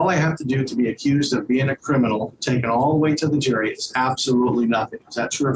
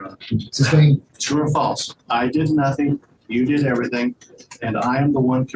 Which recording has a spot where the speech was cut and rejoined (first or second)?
second